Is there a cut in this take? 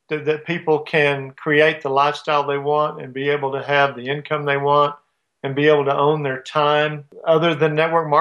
yes; 1 cut; at 7.1 s

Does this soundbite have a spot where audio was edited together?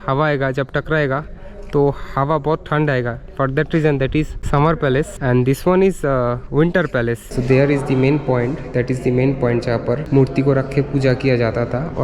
yes; 4 cuts; at 4.4 s, 5.1 s, 7.2 s, 10.0 s

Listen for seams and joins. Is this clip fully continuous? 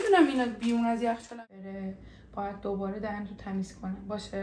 no; 1 cut; at 1.5 s

